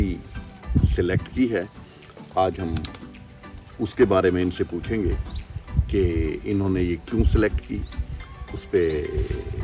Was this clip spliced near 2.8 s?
no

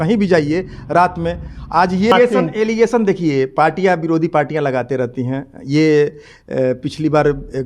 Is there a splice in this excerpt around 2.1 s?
yes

